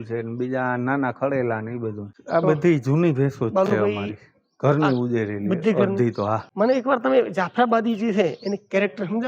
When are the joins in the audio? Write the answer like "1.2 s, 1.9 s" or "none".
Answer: 2.1 s, 6.5 s